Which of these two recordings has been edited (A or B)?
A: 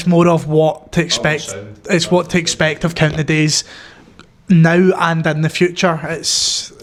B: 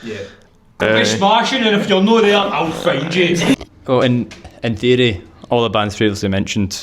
B